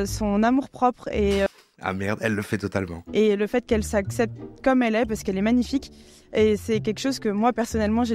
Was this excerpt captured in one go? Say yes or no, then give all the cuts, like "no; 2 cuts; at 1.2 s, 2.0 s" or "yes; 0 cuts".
yes; 0 cuts